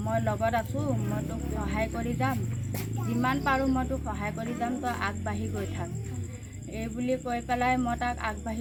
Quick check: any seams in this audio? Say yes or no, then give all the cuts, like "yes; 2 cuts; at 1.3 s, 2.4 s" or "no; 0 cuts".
no; 0 cuts